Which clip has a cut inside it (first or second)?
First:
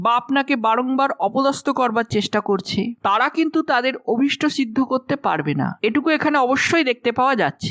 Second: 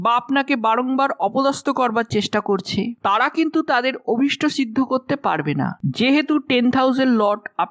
second